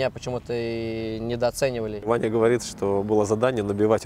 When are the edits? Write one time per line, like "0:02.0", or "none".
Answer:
0:02.0